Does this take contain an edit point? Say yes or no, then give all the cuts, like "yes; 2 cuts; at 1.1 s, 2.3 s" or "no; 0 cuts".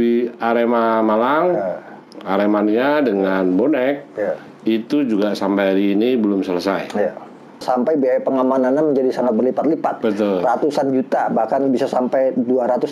yes; 1 cut; at 7.6 s